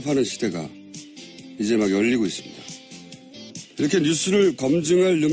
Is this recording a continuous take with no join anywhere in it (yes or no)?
no